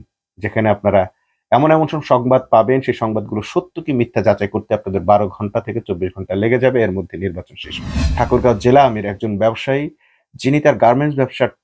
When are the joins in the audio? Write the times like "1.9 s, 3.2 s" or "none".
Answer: 8.0 s

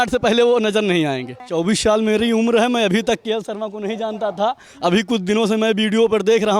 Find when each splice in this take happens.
1.4 s

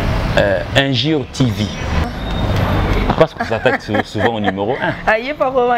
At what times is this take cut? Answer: 2.0 s

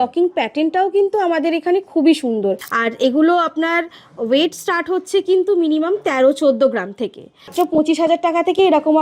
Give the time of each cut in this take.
2.7 s, 7.5 s

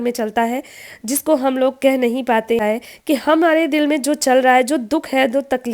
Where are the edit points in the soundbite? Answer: 2.6 s

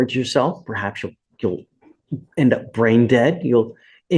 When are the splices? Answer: none

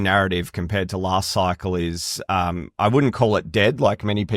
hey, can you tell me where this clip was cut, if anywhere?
none

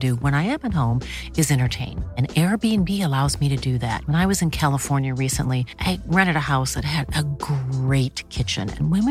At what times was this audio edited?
none

